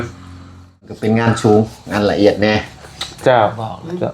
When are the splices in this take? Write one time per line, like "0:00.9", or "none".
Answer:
0:00.9